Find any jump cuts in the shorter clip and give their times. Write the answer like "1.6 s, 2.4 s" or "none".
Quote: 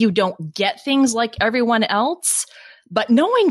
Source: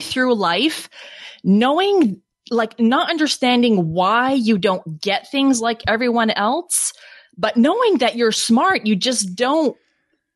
none

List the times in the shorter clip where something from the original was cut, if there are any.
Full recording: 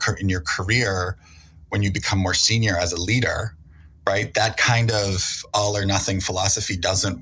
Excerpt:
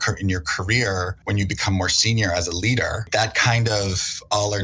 1.2 s, 3.1 s

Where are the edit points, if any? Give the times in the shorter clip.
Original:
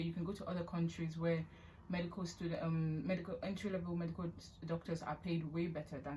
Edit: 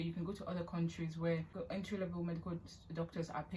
1.6 s

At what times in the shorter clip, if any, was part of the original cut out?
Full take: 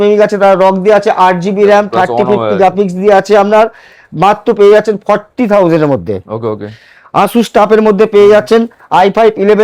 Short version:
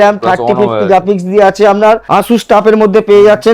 2.0 s

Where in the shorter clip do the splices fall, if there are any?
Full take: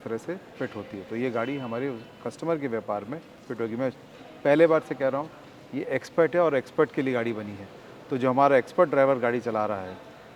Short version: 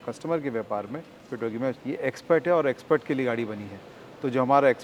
1.9 s

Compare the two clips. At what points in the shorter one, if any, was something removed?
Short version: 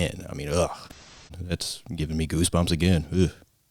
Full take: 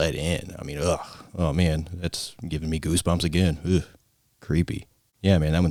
1.2 s

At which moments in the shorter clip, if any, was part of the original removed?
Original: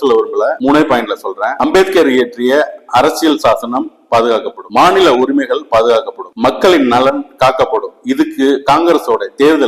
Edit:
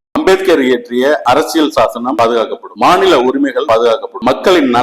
1.2 s, 2.1 s, 3.8 s

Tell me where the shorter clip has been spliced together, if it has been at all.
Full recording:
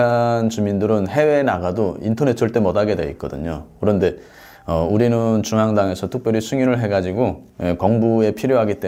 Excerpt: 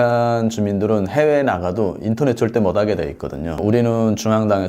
3.6 s

